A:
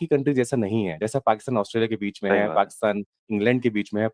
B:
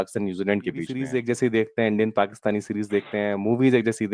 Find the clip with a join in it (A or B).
B